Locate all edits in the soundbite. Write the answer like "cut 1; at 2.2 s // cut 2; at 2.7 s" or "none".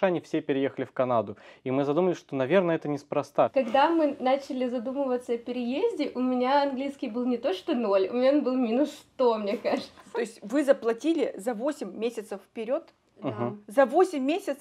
cut 1; at 3.5 s // cut 2; at 10.0 s